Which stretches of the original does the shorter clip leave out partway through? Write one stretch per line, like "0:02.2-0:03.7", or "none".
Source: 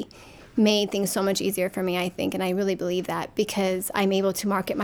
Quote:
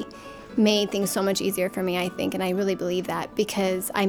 none